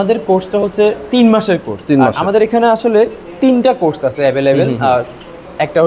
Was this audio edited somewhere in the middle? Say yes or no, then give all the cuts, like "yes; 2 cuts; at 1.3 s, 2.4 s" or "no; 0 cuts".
no; 0 cuts